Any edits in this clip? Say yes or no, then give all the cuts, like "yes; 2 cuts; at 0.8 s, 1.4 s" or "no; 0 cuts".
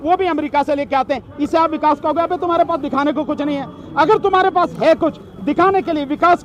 no; 0 cuts